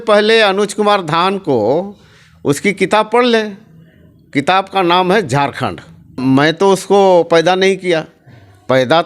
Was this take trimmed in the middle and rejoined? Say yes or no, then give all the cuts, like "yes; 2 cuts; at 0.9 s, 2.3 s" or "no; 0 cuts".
yes; 1 cut; at 6.2 s